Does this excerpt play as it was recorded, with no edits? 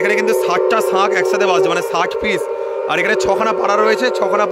yes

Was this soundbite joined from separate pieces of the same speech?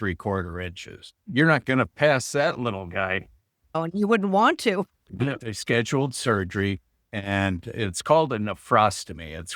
yes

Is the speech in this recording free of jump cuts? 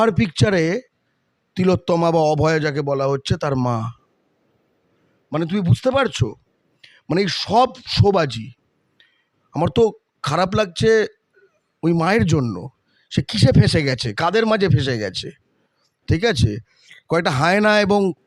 yes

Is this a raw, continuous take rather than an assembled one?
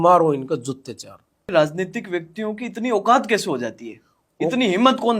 no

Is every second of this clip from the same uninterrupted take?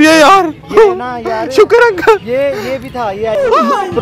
yes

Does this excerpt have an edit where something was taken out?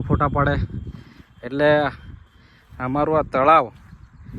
no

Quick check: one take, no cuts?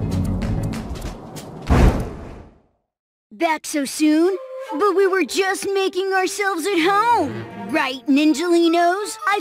no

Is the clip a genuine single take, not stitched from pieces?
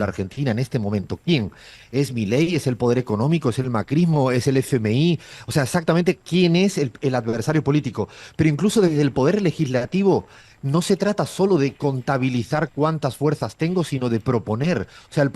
yes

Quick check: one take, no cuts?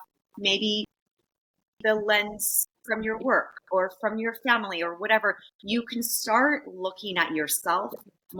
yes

